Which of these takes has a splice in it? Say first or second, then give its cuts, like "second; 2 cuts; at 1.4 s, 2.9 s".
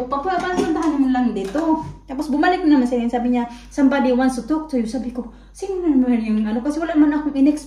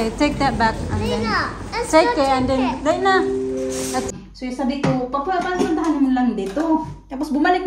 second; 1 cut; at 4.1 s